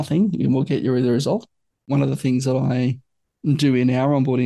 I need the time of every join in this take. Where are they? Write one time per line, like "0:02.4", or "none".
0:01.9